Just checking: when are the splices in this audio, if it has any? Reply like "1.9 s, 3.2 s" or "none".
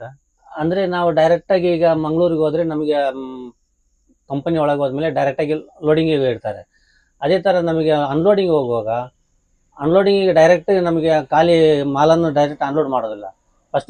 none